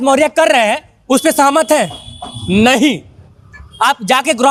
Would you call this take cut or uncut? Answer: uncut